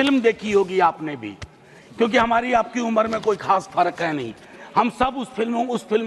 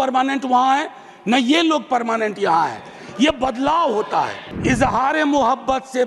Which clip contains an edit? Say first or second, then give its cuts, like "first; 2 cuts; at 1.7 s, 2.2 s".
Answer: second; 1 cut; at 4.5 s